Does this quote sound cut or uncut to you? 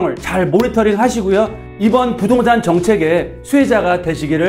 uncut